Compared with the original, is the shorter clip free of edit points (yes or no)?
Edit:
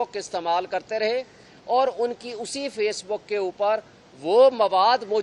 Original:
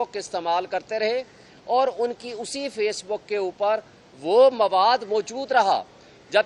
yes